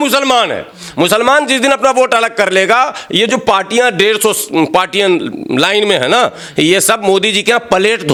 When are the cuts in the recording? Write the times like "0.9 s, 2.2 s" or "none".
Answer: none